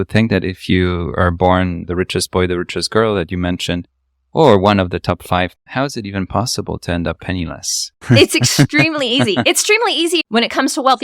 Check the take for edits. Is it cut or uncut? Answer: cut